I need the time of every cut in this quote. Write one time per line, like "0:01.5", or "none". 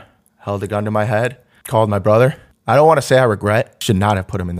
0:01.5
0:02.5
0:03.8